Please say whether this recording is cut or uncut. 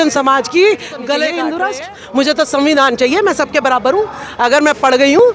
cut